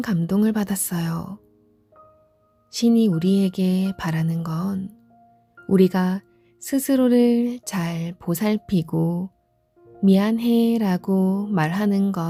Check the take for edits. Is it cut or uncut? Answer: uncut